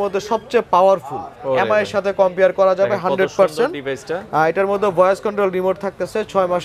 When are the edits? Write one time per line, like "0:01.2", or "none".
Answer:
none